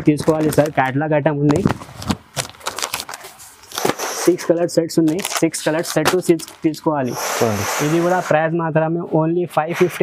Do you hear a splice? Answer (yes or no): no